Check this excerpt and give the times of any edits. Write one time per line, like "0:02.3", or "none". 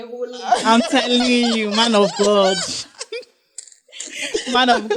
none